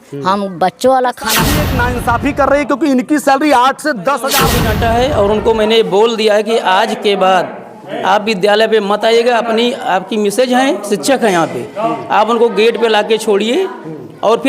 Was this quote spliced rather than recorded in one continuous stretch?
yes; 2 cuts; at 1.6 s, 4.6 s

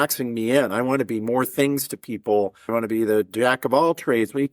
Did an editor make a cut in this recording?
yes; 1 cut; at 2.7 s

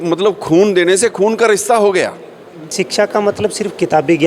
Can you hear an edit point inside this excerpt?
yes; 1 cut; at 2.7 s

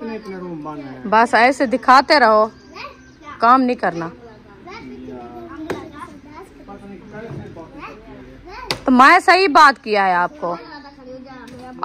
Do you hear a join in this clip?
no; 0 cuts

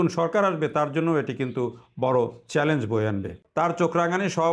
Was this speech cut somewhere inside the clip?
yes; 1 cut; at 3.4 s

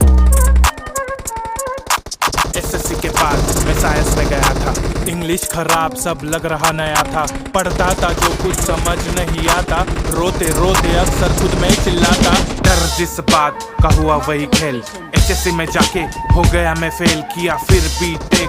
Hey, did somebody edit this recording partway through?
yes; 1 cut; at 2.0 s

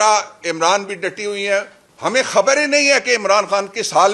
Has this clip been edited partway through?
yes; 1 cut; at 1.8 s

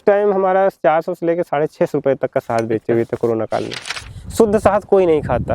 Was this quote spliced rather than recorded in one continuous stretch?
yes; 1 cut; at 3.9 s

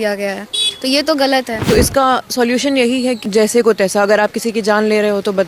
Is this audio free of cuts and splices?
no; 2 cuts; at 1.6 s, 3.2 s

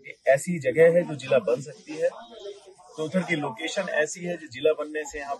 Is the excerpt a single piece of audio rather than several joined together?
yes; 0 cuts

